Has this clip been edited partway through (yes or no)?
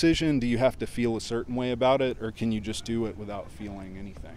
no